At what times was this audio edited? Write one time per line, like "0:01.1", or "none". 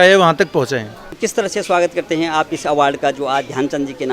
0:01.1